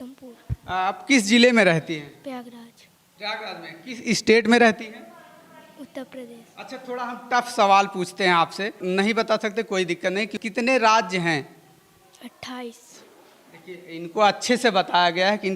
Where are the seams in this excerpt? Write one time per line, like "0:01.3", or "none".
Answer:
none